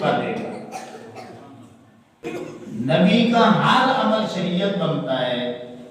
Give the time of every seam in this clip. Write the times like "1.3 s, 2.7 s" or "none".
2.1 s